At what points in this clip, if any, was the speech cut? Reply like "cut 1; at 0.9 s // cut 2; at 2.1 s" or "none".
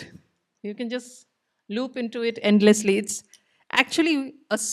none